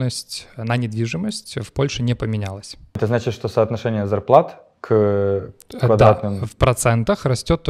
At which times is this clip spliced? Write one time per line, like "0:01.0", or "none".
none